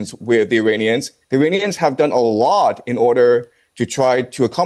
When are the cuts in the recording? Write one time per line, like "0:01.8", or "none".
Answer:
none